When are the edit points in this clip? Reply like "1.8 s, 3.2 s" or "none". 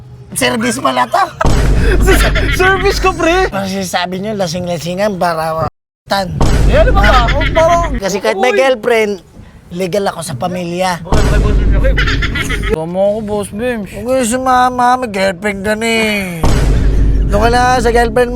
3.5 s, 8.0 s, 12.7 s